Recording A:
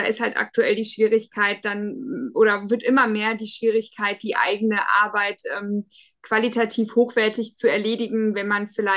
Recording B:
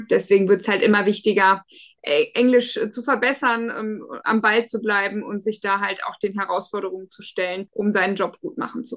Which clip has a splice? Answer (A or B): B